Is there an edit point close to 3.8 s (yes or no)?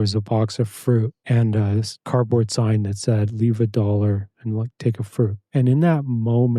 no